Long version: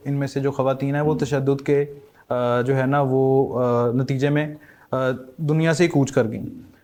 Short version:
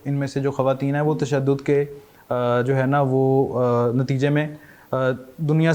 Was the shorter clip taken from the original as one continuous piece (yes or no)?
yes